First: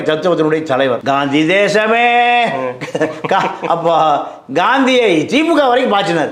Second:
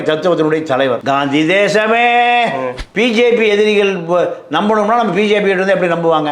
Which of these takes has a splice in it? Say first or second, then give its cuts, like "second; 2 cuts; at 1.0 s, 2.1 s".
second; 1 cut; at 2.8 s